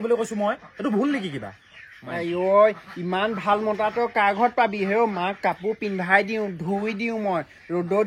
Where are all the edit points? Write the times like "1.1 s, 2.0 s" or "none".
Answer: none